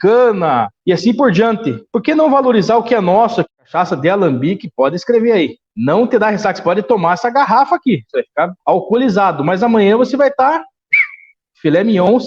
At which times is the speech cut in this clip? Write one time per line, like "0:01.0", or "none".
0:03.5